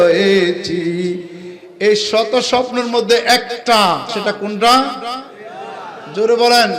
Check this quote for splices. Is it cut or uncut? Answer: cut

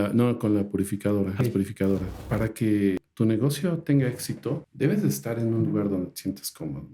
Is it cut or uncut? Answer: cut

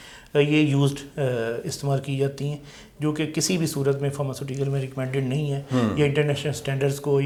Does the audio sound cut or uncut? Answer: uncut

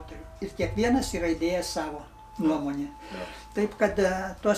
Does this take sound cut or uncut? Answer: uncut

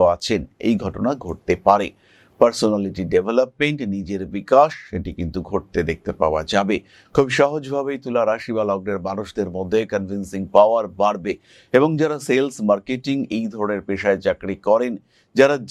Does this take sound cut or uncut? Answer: uncut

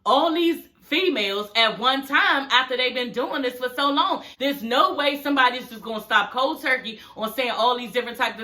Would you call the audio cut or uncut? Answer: cut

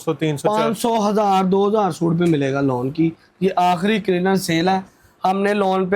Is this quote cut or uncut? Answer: uncut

